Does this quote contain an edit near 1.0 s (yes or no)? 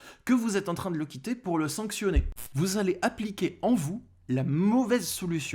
no